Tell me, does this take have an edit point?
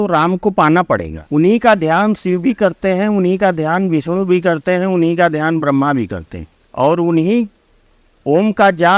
yes; 1 cut; at 1.1 s

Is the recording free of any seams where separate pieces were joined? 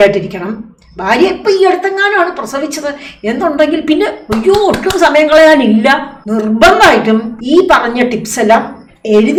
yes; 0 cuts

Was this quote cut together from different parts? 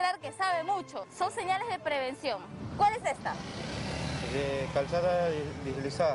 yes; 2 cuts; at 1.1 s, 2.7 s

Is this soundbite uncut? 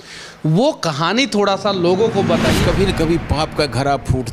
no; 1 cut; at 2.6 s

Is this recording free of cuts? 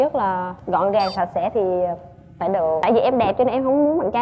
no; 1 cut; at 2.8 s

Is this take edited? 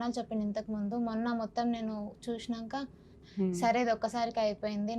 yes; 1 cut; at 3.2 s

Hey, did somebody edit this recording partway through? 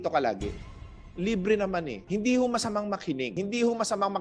yes; 3 cuts; at 0.7 s, 2.0 s, 3.3 s

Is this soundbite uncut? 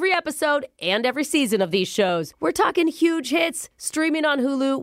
yes; 0 cuts

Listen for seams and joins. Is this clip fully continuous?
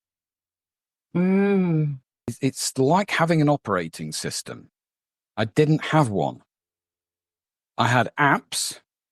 no; 1 cut; at 2.2 s

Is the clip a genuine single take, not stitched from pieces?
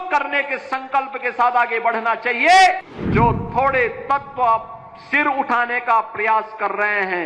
no; 1 cut; at 2.9 s

